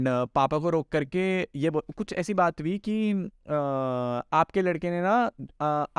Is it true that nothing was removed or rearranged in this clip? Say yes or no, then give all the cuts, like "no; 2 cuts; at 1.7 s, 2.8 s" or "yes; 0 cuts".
yes; 0 cuts